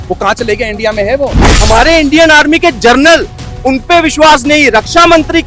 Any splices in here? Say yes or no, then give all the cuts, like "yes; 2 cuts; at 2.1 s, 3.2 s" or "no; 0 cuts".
yes; 1 cut; at 1.5 s